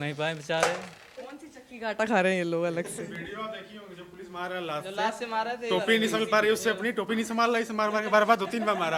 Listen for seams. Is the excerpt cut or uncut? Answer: uncut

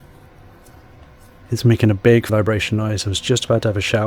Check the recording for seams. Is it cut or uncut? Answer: cut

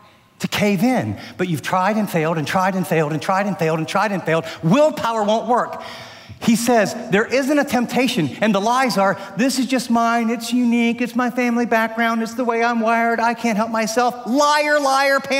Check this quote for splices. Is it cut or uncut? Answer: uncut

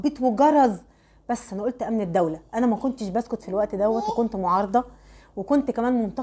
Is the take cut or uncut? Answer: uncut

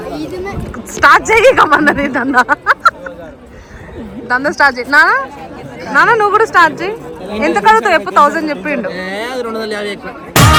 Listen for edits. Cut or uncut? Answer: uncut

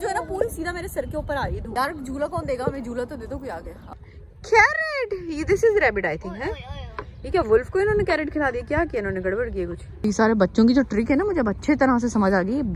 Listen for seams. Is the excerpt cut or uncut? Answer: cut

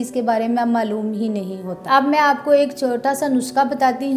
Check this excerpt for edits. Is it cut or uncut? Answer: cut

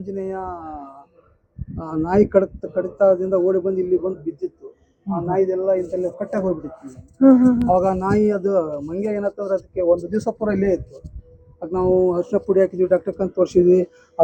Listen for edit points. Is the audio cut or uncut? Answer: uncut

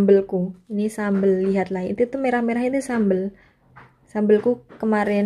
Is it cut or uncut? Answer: uncut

